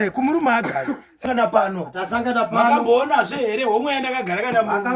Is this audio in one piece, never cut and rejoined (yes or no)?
no